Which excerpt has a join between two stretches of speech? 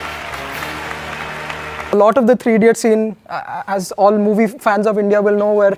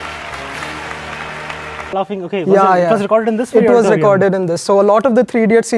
second; 2 cuts; at 1.9 s, 4.8 s

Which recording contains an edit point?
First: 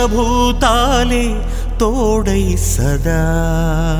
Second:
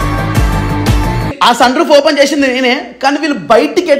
second; 1 cut; at 1.2 s

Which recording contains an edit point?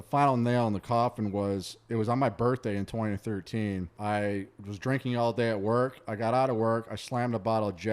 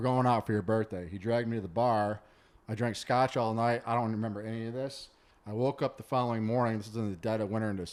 first; 1 cut; at 3.9 s

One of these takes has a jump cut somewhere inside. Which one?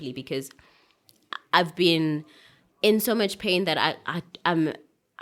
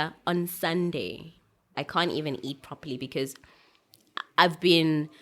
second; 1 cut; at 1.7 s

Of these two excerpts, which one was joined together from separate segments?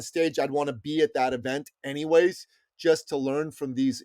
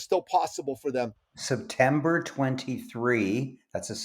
second; 1 cut; at 1.2 s

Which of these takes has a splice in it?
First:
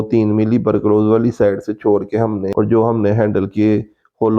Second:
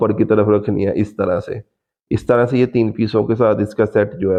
first; 1 cut; at 2.5 s

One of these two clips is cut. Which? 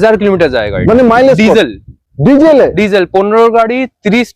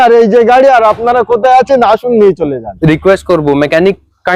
second; 1 cut; at 2.7 s

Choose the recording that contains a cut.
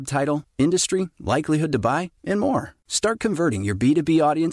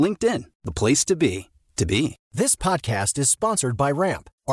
second; 1 cut; at 2.2 s

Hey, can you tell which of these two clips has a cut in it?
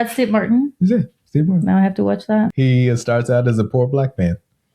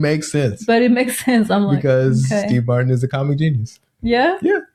first; 1 cut; at 2.5 s

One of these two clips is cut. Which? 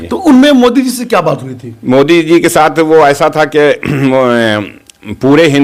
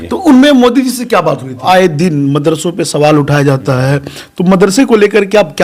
second; 1 cut; at 1.6 s

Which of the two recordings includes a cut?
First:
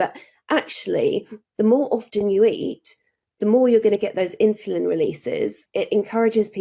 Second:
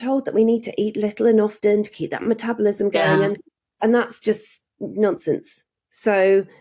first; 1 cut; at 5.6 s

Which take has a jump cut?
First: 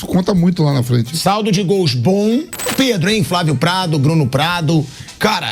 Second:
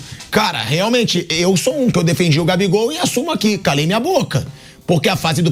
first; 1 cut; at 2.7 s

